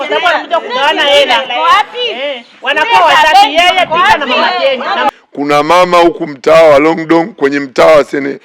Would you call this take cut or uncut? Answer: cut